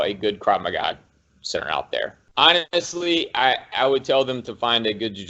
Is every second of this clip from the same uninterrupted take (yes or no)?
no